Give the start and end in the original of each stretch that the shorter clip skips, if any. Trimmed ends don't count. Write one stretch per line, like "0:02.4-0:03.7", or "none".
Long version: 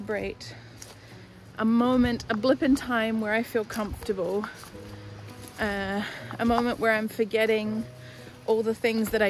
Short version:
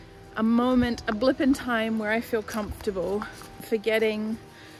0:04.9-0:07.1